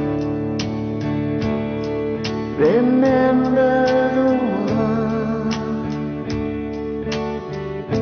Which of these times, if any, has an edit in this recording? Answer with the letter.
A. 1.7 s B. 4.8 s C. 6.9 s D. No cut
D